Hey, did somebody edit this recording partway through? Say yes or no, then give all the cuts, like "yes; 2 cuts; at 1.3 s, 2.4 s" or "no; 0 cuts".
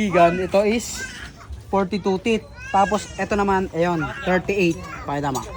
no; 0 cuts